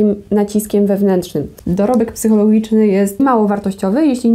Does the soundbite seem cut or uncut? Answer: cut